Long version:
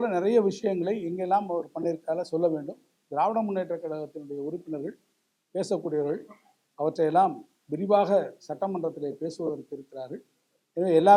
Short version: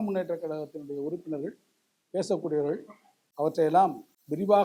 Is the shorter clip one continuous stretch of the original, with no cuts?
yes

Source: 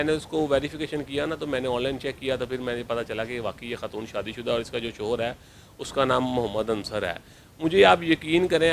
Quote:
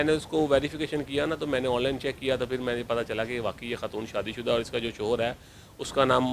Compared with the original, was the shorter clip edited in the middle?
no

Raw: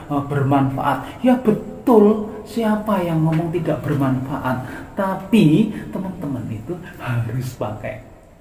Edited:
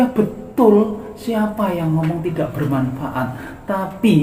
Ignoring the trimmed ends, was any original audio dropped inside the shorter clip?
no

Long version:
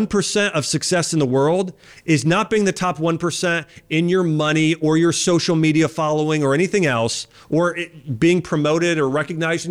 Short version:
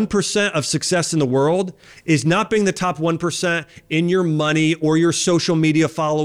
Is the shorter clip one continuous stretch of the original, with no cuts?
yes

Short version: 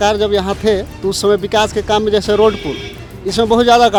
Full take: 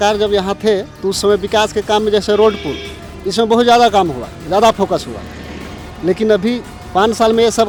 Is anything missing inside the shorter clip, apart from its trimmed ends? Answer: no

